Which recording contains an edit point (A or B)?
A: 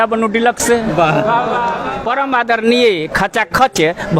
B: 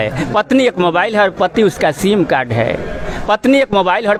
A